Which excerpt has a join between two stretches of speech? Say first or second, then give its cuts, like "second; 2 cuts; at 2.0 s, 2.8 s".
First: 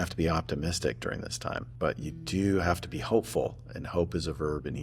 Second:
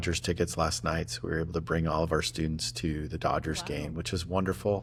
first; 1 cut; at 1.7 s